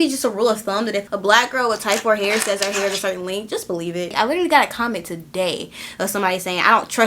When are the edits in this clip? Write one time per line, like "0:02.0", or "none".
0:01.0
0:04.1